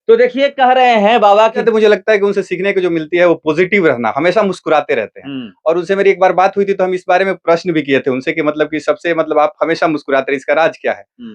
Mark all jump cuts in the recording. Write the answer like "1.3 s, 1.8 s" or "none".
1.6 s